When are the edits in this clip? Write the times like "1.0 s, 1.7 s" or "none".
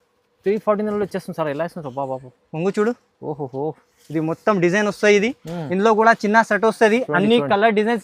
none